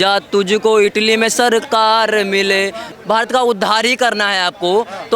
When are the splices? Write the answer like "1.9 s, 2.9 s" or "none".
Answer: 2.9 s

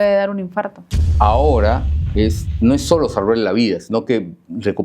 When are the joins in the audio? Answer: 1.1 s

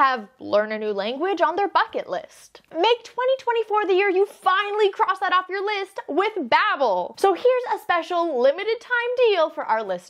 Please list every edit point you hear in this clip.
2.6 s, 7.1 s

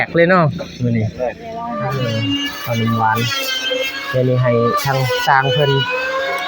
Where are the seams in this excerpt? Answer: 1.8 s

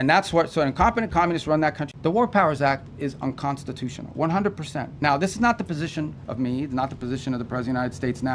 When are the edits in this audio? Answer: 1.9 s

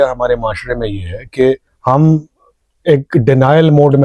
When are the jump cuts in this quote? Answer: 1.7 s

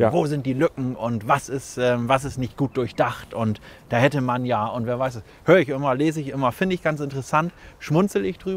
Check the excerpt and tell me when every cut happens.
none

